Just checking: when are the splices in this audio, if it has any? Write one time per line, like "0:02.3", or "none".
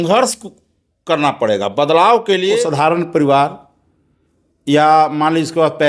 0:02.6